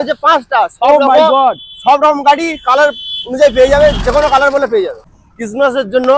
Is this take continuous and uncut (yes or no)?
no